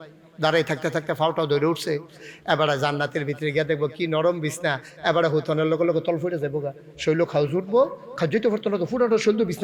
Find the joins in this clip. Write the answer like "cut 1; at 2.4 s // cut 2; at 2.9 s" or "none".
none